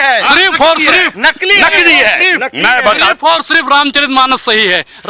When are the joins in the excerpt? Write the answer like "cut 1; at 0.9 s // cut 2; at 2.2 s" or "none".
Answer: none

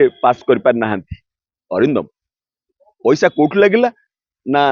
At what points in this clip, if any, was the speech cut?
none

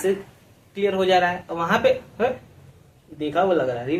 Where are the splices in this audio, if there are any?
none

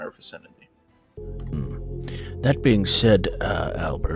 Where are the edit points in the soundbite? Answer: cut 1; at 1.0 s

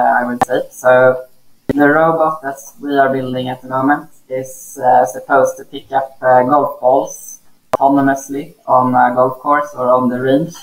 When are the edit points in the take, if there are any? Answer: none

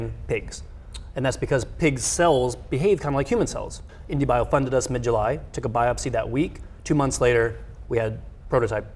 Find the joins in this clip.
cut 1; at 3.9 s

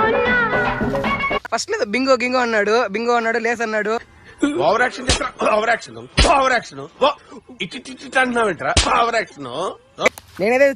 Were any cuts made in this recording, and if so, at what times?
cut 1; at 1.5 s // cut 2; at 10.1 s

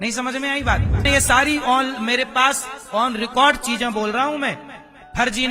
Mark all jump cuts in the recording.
cut 1; at 1.0 s

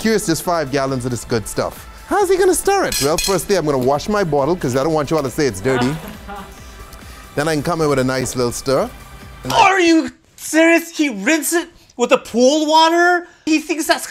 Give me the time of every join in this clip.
none

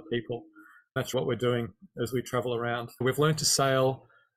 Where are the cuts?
cut 1; at 1.1 s // cut 2; at 3.0 s

